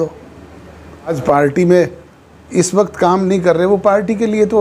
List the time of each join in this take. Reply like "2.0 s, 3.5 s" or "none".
1.2 s